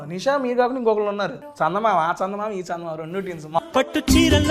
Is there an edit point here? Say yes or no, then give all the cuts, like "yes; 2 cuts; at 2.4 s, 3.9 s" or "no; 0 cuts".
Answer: yes; 2 cuts; at 1.4 s, 3.6 s